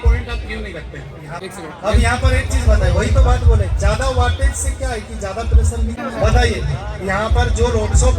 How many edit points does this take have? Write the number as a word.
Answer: two